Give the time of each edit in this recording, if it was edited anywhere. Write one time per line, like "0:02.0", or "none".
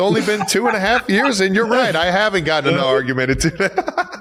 none